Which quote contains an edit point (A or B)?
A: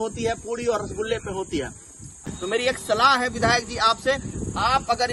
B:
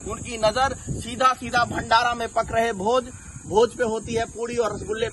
A